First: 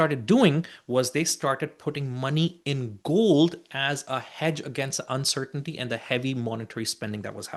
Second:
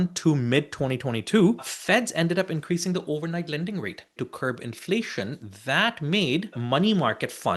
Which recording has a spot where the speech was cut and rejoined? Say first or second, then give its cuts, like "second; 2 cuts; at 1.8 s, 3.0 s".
second; 3 cuts; at 1.7 s, 4.2 s, 6.6 s